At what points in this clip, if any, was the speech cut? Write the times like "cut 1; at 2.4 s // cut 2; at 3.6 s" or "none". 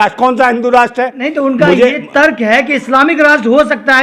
none

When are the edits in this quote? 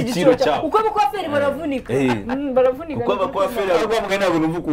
none

